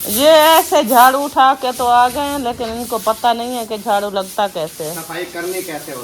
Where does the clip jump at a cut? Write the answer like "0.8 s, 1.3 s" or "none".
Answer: none

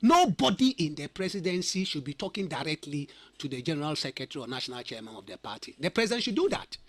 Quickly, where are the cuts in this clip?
none

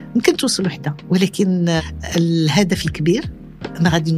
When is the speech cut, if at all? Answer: 1.0 s, 1.9 s

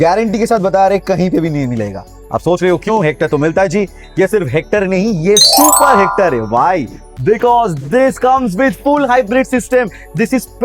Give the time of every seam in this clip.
none

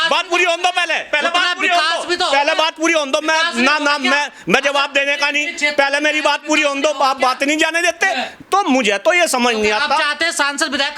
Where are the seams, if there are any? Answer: 8.3 s

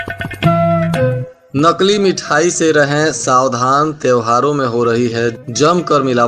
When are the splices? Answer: 1.3 s

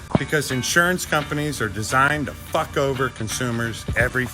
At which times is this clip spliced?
none

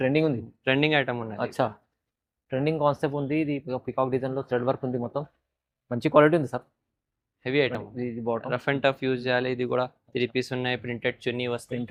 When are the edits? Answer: none

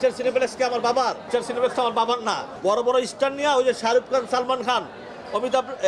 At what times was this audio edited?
1.2 s, 2.5 s

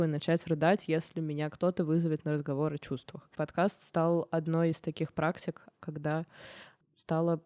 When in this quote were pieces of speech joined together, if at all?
5.8 s

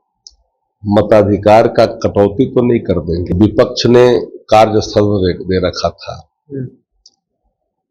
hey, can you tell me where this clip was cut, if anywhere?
3.3 s

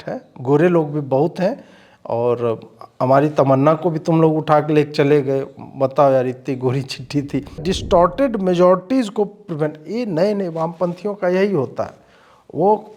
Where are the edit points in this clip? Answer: 7.7 s

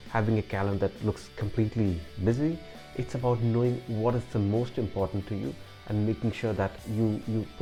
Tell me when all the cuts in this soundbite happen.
none

